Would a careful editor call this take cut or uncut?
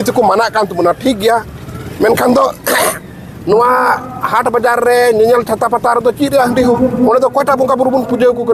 uncut